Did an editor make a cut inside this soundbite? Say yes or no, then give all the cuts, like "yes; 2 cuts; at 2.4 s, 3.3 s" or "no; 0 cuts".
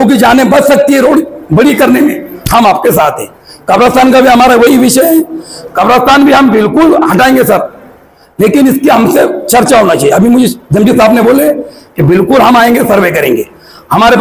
no; 0 cuts